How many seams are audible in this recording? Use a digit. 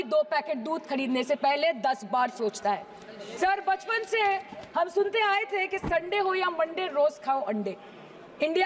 0